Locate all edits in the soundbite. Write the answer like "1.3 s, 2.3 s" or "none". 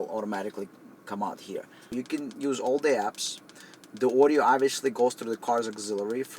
1.9 s